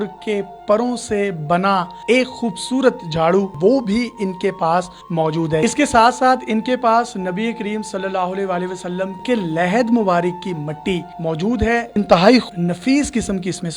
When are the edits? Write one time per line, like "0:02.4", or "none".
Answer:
0:03.5
0:05.6
0:09.2
0:11.9
0:12.5